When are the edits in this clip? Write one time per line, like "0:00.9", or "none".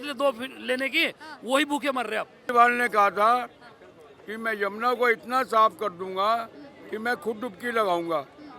0:02.4